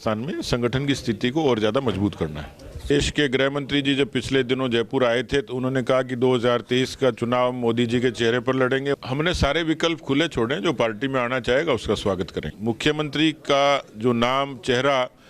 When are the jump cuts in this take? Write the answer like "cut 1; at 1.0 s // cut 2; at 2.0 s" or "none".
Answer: cut 1; at 2.9 s // cut 2; at 9.0 s // cut 3; at 12.5 s